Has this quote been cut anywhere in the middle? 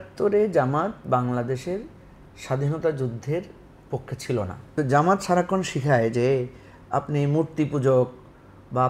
yes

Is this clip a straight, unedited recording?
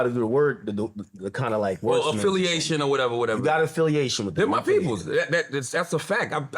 no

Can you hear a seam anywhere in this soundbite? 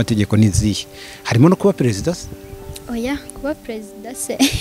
no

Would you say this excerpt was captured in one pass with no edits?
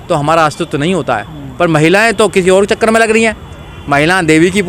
yes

